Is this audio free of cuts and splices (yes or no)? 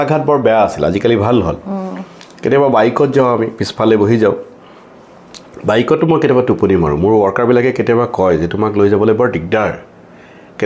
yes